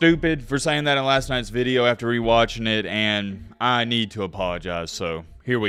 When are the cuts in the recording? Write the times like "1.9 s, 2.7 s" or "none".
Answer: none

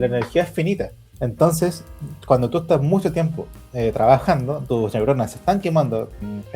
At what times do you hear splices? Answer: 1.0 s, 4.6 s

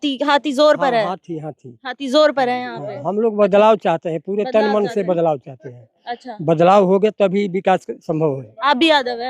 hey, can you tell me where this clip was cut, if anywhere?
none

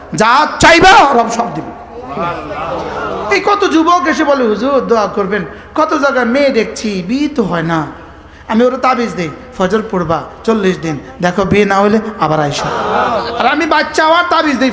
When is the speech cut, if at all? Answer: 3.3 s, 12.6 s

